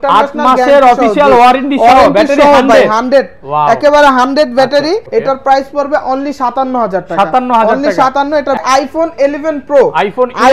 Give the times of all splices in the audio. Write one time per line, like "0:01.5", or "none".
0:05.0
0:08.6